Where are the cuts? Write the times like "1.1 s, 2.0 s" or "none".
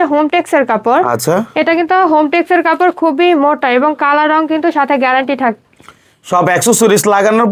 none